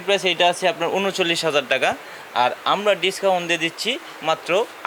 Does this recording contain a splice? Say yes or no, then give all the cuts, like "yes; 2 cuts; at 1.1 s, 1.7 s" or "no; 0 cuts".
no; 0 cuts